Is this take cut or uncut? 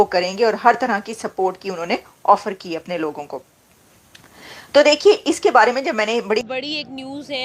cut